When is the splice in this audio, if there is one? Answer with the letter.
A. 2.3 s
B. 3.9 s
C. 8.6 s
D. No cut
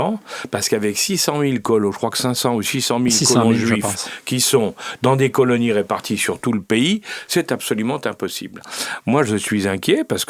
C